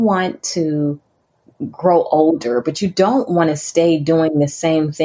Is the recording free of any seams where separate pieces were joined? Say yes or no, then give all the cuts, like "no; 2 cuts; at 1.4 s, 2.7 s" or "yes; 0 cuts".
yes; 0 cuts